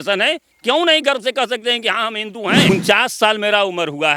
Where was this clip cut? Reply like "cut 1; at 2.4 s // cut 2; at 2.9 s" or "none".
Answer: cut 1; at 2.7 s